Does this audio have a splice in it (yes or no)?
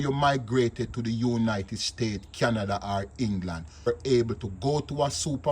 yes